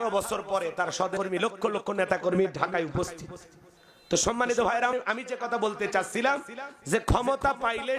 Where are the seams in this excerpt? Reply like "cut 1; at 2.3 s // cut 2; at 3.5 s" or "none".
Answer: cut 1; at 1.1 s